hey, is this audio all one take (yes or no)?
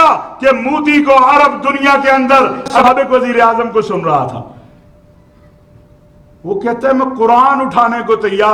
no